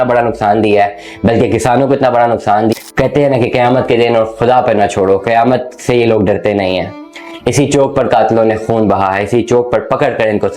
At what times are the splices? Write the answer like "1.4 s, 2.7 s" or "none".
2.7 s